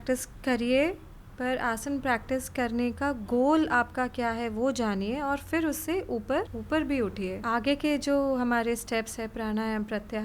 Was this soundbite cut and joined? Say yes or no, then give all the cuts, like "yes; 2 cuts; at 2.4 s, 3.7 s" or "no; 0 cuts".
no; 0 cuts